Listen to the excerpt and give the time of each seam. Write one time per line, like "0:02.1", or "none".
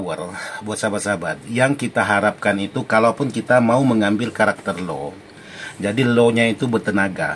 none